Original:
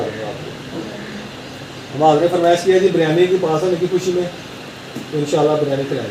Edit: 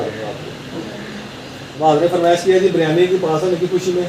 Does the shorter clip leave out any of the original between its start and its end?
yes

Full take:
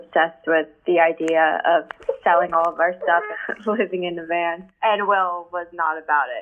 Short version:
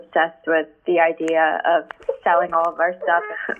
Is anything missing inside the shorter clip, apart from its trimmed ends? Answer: no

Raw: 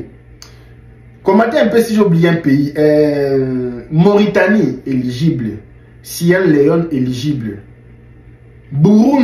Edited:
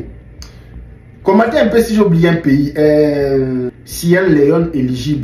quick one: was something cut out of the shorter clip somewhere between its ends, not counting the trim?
yes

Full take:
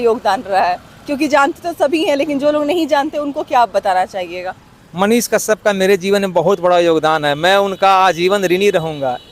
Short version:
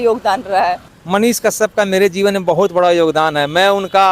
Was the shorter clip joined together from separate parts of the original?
yes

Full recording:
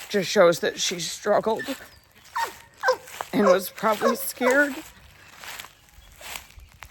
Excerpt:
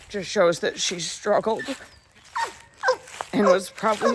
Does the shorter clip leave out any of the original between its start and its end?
no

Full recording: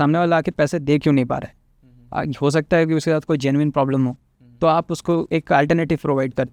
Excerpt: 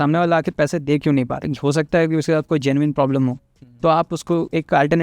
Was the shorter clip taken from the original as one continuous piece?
no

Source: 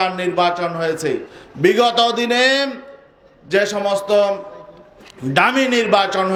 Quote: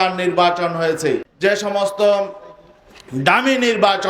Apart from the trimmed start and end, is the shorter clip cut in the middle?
yes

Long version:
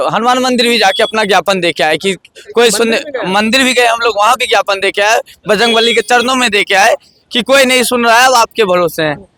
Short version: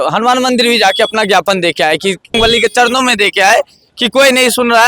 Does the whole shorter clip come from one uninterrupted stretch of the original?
no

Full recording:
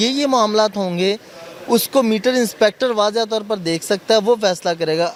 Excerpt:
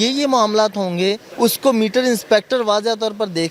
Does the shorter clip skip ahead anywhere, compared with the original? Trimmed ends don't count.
yes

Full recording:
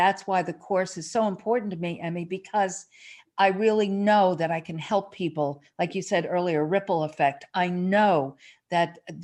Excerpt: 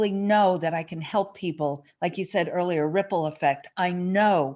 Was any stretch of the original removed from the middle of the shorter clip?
no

